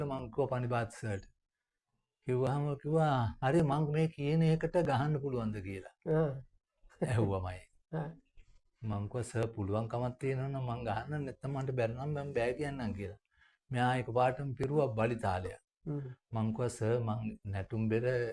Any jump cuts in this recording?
no; 0 cuts

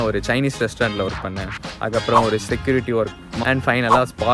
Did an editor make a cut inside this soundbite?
yes; 1 cut; at 3.3 s

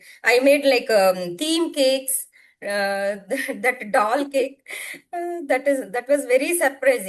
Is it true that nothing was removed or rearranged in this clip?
yes; 0 cuts

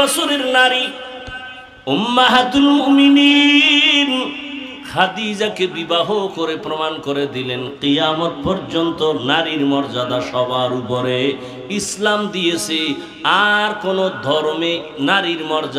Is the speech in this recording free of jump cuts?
yes; 0 cuts

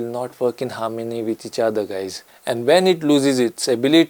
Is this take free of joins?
no; 1 cut; at 2.2 s

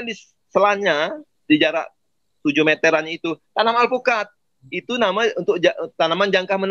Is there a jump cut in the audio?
no; 0 cuts

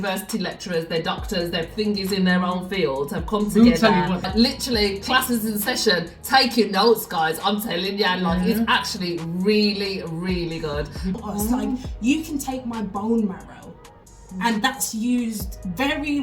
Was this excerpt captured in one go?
no; 2 cuts; at 4.3 s, 11.1 s

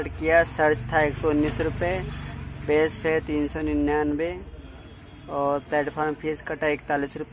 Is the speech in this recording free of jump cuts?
yes; 0 cuts

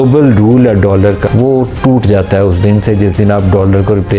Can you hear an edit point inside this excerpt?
yes; 1 cut; at 1.2 s

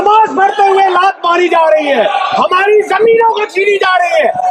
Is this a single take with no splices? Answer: yes; 0 cuts

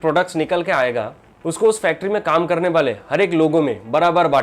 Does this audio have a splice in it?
no; 0 cuts

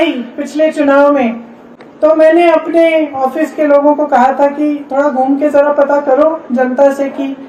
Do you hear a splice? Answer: no; 0 cuts

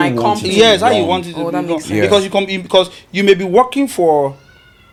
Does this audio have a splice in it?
no; 0 cuts

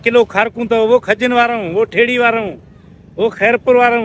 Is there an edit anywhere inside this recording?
no; 0 cuts

